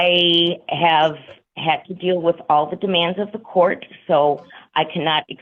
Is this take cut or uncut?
uncut